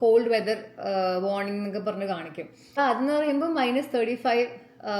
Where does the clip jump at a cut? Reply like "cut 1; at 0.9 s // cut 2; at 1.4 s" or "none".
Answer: cut 1; at 2.8 s

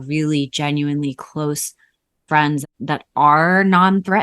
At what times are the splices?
cut 1; at 2.6 s

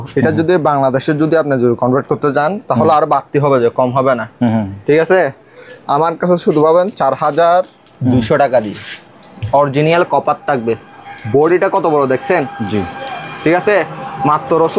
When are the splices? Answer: none

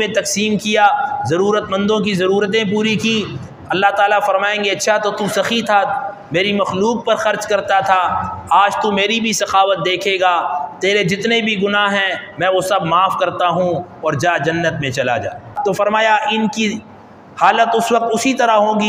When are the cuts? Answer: cut 1; at 15.5 s

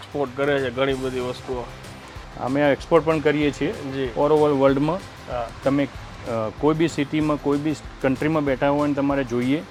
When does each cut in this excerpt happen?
none

